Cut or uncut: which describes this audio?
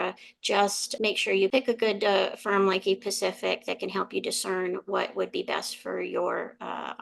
cut